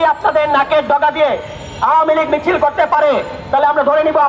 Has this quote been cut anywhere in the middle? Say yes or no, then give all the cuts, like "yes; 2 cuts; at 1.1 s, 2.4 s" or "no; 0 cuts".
no; 0 cuts